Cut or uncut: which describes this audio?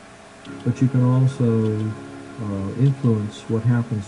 cut